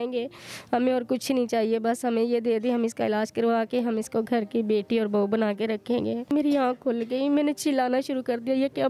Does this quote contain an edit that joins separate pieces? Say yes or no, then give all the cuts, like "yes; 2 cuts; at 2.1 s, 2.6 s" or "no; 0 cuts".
yes; 1 cut; at 6.3 s